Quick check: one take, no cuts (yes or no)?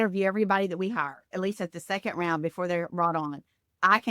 no